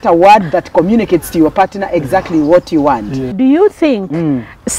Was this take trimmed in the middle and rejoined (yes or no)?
yes